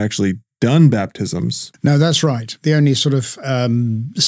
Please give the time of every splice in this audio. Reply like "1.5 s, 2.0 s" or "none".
1.7 s, 2.5 s